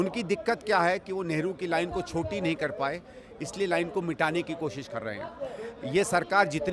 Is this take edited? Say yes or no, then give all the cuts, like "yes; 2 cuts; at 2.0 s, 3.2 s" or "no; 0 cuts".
no; 0 cuts